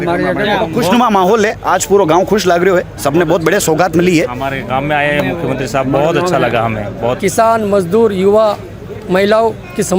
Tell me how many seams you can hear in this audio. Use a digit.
1